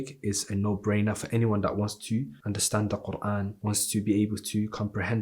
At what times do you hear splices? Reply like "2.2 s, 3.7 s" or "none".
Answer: 2.3 s, 3.5 s